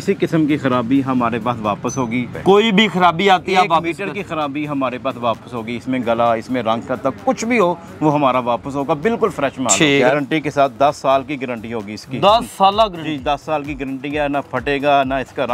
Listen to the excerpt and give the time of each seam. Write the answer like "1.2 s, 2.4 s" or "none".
2.3 s, 10.0 s